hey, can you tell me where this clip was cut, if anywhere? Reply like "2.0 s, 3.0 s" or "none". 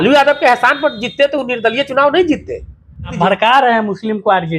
3.1 s